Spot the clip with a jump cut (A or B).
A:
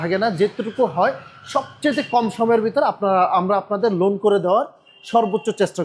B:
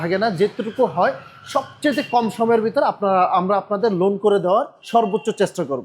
B